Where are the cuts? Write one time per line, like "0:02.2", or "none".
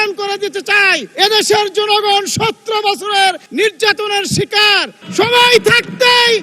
0:01.1
0:05.0